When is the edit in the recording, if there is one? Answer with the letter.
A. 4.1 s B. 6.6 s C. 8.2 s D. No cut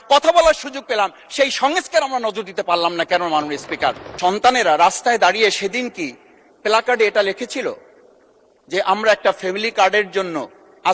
A